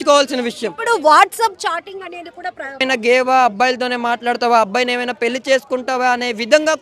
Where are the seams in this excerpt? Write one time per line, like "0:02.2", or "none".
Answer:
0:02.8